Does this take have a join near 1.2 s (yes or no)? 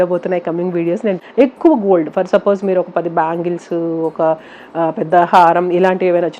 yes